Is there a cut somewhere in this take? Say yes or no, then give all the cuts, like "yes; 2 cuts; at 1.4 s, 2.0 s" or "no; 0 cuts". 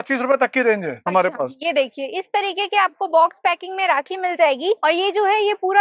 no; 0 cuts